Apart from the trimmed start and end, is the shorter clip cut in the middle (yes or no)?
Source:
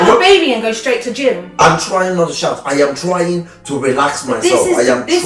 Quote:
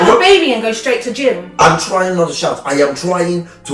no